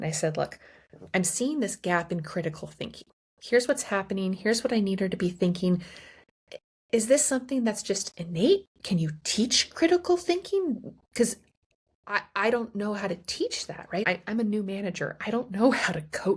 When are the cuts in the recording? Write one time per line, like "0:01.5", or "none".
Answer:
0:14.0

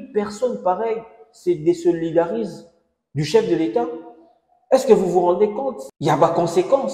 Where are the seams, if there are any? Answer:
0:05.8

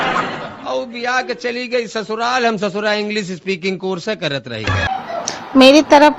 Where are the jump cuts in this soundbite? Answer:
0:04.9

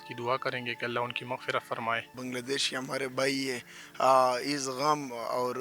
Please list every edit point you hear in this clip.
0:02.2

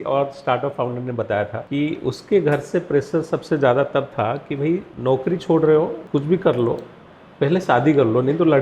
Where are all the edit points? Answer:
0:01.6
0:04.9
0:06.0

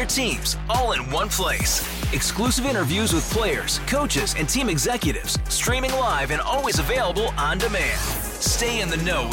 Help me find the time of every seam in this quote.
none

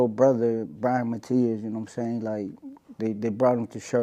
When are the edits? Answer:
none

